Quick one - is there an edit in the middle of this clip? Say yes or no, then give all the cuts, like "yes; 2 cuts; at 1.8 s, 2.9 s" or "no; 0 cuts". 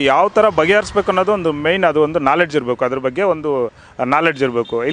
no; 0 cuts